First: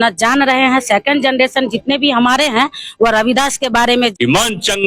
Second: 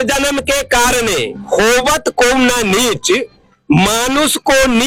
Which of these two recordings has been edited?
first; 1 cut; at 3.9 s

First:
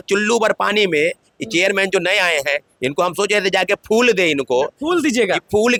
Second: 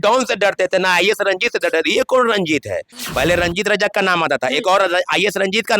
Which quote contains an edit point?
second; 1 cut; at 2.9 s

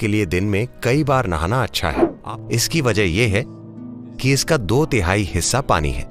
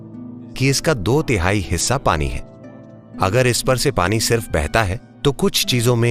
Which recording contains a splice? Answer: first; 1 cut; at 2.1 s

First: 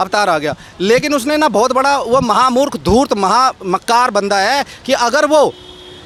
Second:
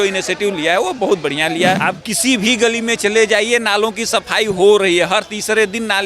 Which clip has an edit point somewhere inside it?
second; 1 cut; at 1.8 s

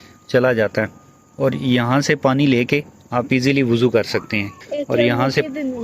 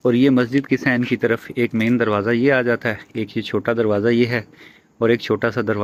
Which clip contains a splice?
first; 1 cut; at 4.5 s

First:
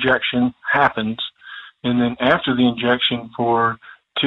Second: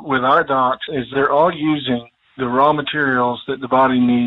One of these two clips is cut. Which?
second; 1 cut; at 1.1 s

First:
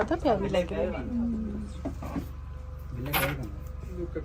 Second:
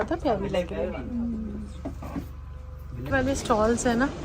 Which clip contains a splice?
second; 1 cut; at 3.1 s

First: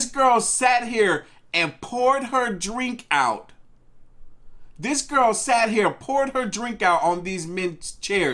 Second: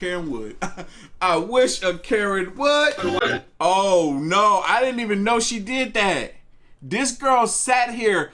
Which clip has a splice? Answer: second; 1 cut; at 3.2 s

